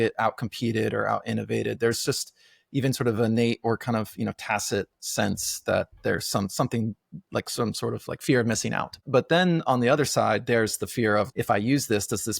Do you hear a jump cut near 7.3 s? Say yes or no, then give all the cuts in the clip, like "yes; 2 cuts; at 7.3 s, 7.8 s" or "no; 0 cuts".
no; 2 cuts; at 9.0 s, 11.3 s